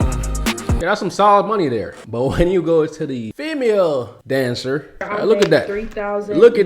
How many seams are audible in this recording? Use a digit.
2